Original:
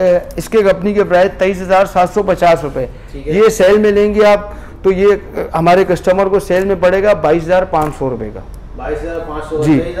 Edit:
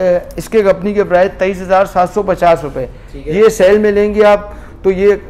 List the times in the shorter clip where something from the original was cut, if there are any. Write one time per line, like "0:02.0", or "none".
none

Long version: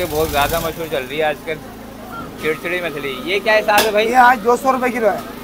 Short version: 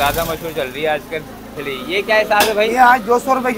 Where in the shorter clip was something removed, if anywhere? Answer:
0:01.6

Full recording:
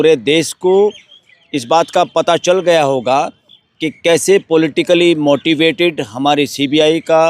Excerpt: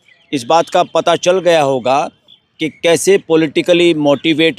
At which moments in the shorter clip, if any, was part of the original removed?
none

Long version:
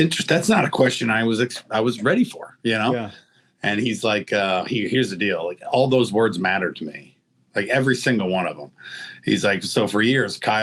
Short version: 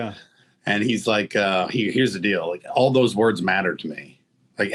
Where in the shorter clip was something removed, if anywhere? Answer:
none

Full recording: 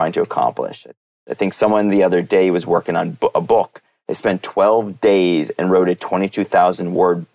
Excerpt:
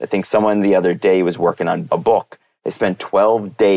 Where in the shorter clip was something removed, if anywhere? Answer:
0:01.9

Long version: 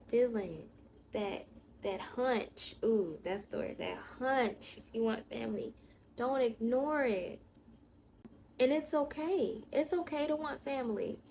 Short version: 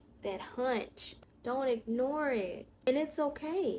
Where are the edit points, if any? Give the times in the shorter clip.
0:01.1
0:02.7

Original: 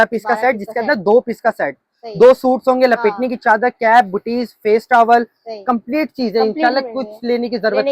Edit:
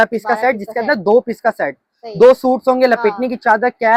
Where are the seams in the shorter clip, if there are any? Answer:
none

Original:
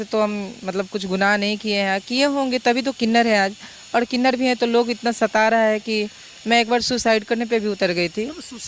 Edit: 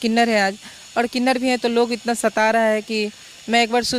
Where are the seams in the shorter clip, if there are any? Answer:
none

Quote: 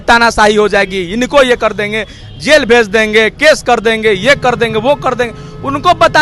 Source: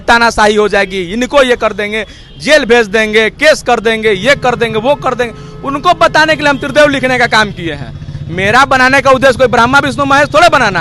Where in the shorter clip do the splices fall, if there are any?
none

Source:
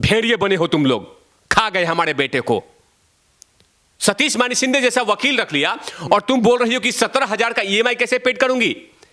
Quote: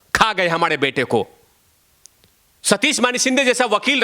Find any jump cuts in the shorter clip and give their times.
none

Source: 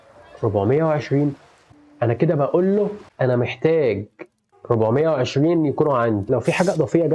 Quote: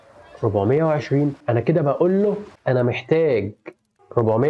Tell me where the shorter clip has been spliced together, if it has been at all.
0:01.4

